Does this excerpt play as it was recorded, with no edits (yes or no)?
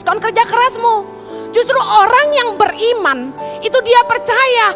yes